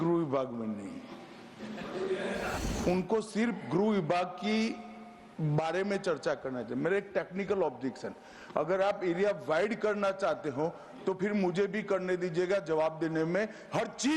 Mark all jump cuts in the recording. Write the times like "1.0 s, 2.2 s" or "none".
2.6 s